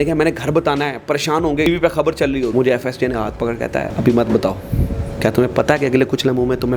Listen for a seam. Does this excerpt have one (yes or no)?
yes